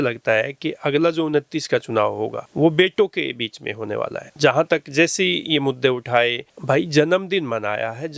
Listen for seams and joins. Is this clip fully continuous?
yes; 0 cuts

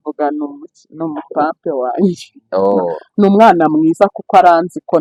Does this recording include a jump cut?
no; 0 cuts

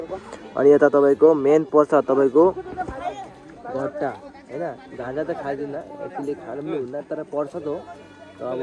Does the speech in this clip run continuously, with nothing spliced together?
yes; 0 cuts

